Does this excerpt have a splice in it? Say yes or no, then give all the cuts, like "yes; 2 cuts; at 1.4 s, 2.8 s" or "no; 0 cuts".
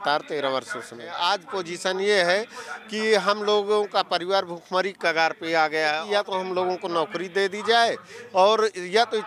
yes; 2 cuts; at 1.1 s, 6.0 s